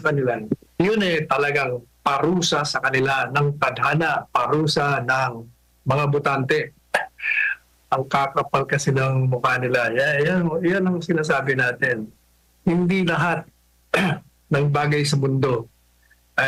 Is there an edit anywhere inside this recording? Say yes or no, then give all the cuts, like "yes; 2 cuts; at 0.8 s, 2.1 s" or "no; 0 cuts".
no; 0 cuts